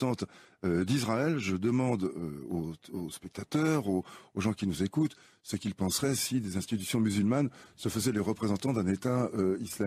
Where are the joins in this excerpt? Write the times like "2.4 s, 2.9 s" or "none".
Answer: 2.2 s

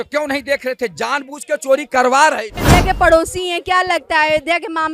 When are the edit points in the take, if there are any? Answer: 2.5 s

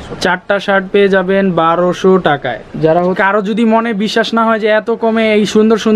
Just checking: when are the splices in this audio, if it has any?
3.2 s

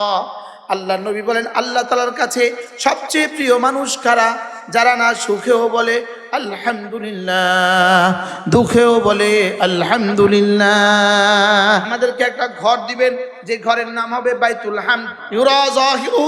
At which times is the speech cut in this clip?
11.9 s, 15.2 s

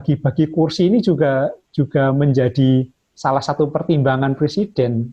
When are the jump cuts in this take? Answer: none

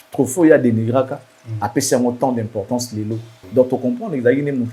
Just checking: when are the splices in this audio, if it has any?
3.4 s

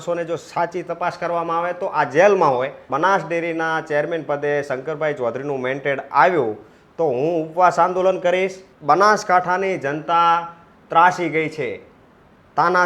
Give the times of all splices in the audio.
2.8 s, 8.7 s

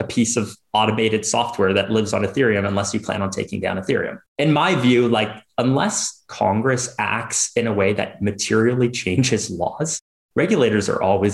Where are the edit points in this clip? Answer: none

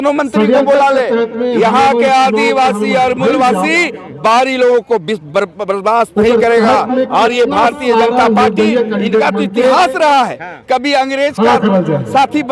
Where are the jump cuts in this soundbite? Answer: none

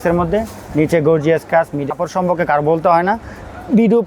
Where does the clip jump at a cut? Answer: 1.8 s

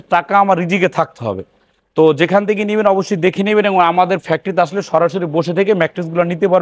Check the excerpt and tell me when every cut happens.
none

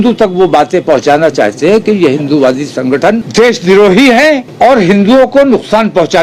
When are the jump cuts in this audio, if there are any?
3.3 s, 4.5 s

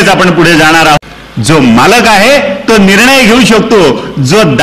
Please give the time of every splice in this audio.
1.0 s

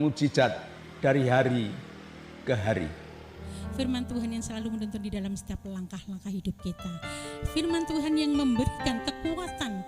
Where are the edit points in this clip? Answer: 3.5 s

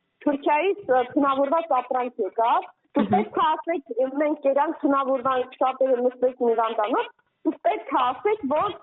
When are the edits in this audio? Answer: none

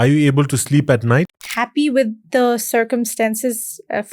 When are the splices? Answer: 1.4 s

